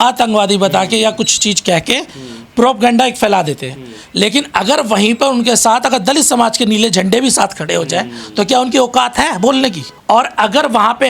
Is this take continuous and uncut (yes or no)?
no